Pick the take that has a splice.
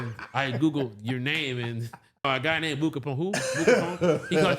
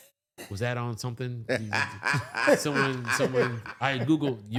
first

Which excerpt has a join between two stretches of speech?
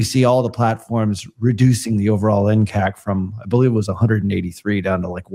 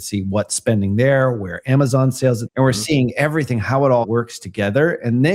second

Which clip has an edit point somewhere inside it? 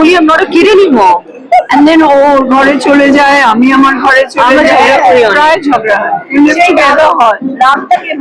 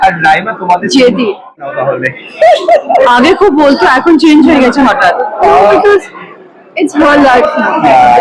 second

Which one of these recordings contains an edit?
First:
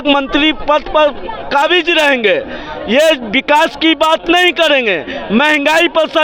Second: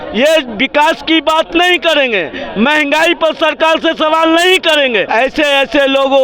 second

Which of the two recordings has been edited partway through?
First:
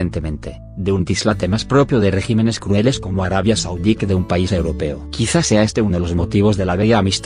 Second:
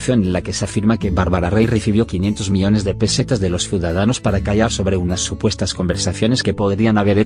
first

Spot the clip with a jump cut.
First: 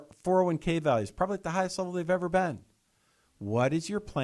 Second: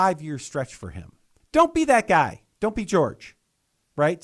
second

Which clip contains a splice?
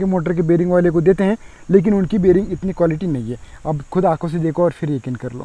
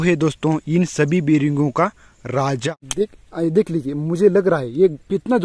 second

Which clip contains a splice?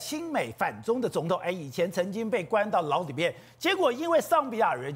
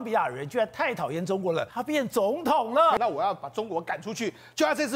second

